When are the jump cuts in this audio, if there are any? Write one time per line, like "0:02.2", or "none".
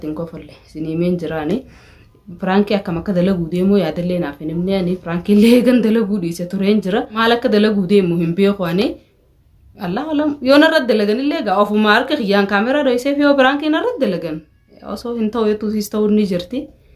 0:07.2